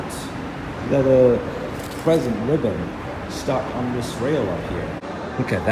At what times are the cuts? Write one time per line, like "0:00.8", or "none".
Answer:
none